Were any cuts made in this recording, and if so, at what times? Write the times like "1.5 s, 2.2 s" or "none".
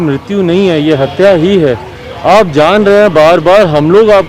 none